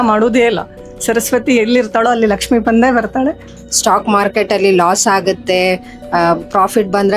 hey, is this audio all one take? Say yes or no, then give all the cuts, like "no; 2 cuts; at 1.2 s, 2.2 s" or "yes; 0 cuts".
no; 1 cut; at 3.6 s